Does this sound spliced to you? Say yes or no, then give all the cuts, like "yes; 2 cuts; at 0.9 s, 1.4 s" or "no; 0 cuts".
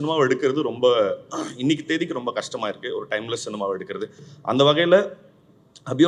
no; 0 cuts